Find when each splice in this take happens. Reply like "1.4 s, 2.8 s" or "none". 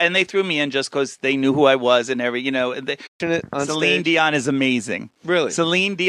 none